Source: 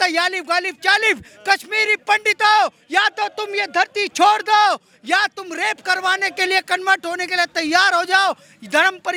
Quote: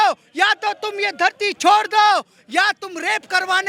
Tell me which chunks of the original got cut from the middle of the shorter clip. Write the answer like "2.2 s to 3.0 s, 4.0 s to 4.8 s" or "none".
none